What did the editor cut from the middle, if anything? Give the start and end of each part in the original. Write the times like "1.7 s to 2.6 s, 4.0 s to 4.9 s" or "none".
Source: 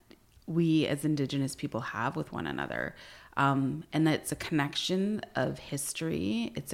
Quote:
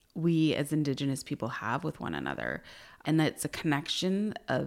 3.3 s to 3.8 s